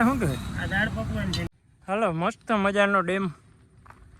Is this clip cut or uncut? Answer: cut